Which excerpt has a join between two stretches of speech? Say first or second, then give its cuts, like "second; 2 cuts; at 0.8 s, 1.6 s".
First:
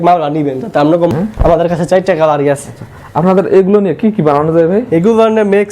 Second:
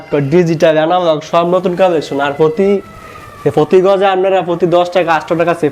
first; 1 cut; at 1.1 s